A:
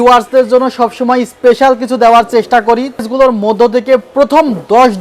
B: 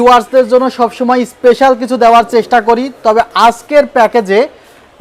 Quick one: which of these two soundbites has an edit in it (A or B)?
A